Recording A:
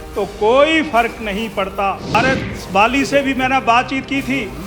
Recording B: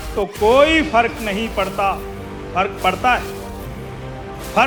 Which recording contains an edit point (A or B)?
A